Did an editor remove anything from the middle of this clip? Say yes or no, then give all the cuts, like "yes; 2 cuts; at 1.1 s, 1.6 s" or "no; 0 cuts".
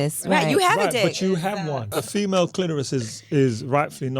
yes; 1 cut; at 1.9 s